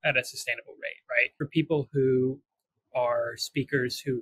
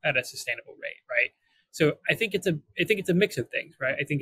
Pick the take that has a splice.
first; 1 cut; at 1.4 s

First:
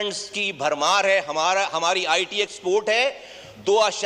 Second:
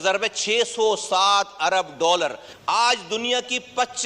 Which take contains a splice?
second; 1 cut; at 2.5 s

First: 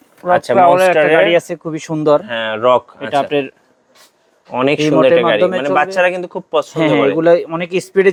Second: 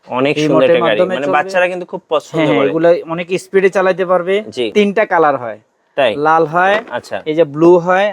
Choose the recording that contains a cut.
second; 1 cut; at 4.7 s

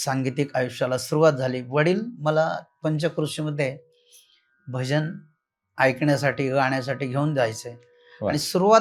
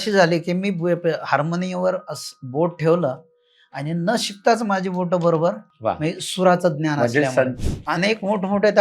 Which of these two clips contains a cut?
second; 2 cuts; at 5.7 s, 7.5 s

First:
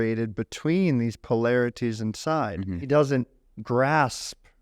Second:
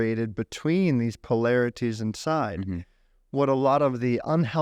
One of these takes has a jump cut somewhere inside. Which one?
first; 1 cut; at 2.8 s

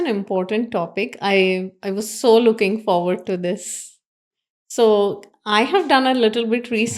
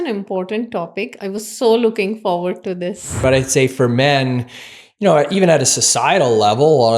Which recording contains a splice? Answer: second; 2 cuts; at 1.1 s, 3.2 s

